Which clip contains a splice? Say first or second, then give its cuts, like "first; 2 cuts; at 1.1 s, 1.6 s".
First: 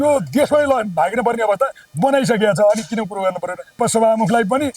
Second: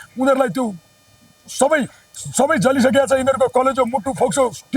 first; 1 cut; at 3.7 s